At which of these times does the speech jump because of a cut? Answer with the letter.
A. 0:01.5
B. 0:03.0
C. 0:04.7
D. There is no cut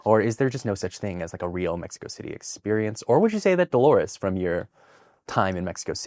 D